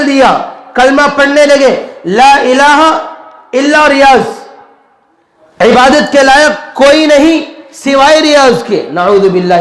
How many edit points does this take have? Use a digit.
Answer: 0